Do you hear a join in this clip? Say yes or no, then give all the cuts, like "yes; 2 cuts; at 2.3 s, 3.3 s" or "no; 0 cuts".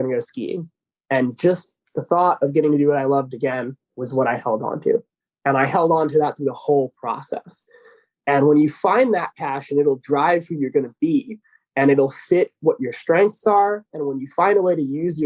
no; 0 cuts